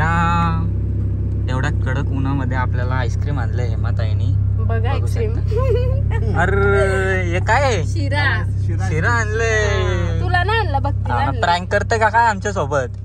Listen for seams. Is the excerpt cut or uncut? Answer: uncut